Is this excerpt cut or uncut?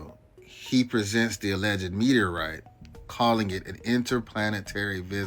uncut